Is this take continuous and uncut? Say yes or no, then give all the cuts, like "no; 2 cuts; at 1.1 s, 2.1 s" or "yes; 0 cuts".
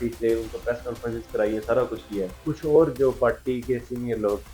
no; 1 cut; at 2.4 s